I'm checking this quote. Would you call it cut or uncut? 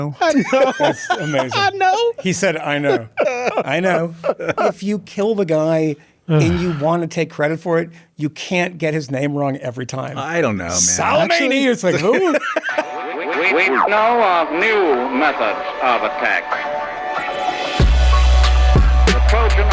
cut